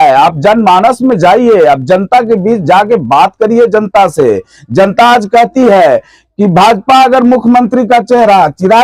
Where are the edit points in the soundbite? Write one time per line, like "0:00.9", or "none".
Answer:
none